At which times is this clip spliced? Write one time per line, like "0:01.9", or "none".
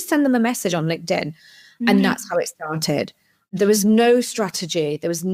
none